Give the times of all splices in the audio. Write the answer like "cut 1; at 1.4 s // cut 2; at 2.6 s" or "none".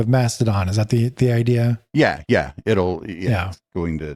none